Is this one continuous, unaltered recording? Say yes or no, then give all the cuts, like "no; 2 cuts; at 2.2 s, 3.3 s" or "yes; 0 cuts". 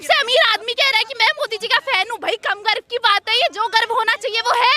yes; 0 cuts